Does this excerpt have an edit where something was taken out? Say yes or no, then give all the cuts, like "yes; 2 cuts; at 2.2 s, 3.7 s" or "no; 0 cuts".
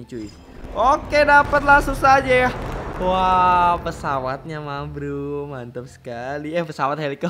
no; 0 cuts